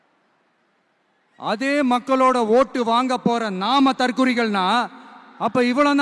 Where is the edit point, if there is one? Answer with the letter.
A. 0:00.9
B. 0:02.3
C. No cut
C